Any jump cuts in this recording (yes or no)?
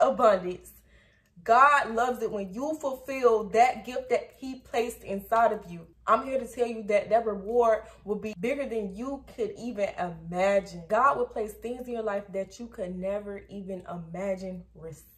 yes